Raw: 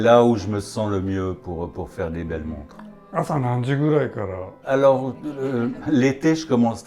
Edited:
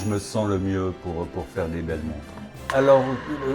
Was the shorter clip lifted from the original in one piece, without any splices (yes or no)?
no